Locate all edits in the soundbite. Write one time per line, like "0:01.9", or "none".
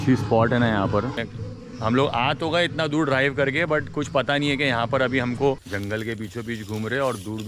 0:01.2
0:05.7